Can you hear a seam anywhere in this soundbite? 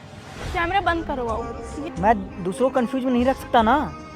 yes; 1 cut; at 1.9 s

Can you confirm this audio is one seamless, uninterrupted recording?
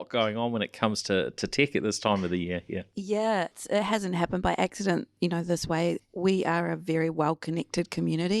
no; 2 cuts; at 3.5 s, 6.0 s

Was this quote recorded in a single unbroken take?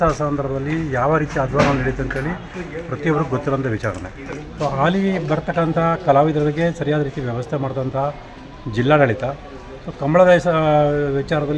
yes; 0 cuts

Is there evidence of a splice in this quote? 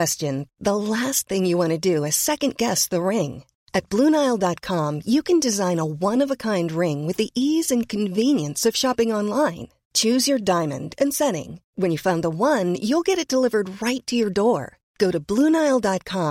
no; 0 cuts

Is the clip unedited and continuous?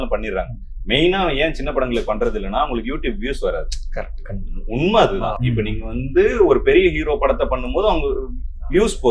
yes; 0 cuts

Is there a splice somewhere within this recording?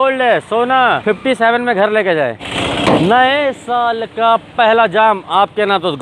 yes; 2 cuts; at 1.0 s, 2.5 s

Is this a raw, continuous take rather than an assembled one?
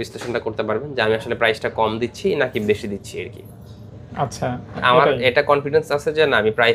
yes; 0 cuts

